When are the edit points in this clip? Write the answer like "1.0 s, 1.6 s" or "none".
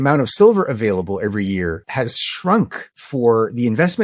1.8 s, 2.9 s